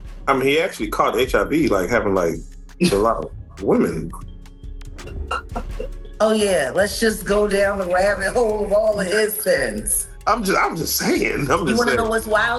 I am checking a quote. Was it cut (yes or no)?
no